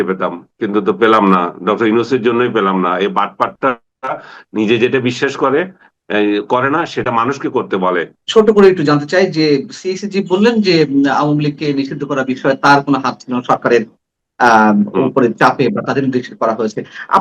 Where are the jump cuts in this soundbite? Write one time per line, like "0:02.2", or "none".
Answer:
0:08.1